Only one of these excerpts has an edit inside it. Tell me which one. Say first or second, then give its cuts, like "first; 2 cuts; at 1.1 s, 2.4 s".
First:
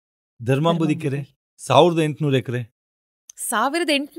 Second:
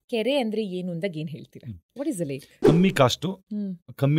second; 1 cut; at 2.5 s